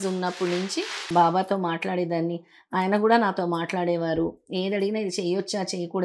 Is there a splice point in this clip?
yes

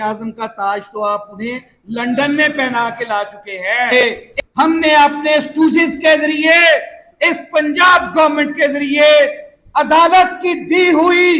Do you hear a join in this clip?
yes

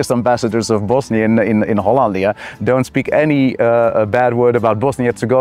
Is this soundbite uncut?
yes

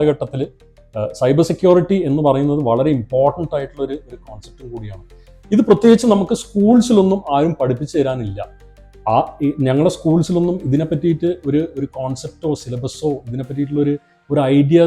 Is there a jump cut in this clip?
no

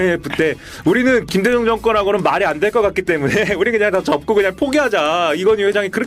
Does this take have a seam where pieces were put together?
yes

